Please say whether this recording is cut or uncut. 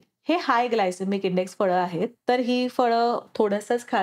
cut